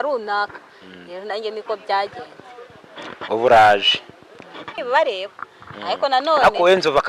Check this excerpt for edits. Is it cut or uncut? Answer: cut